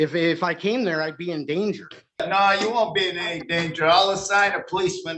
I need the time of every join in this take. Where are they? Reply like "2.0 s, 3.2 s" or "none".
2.2 s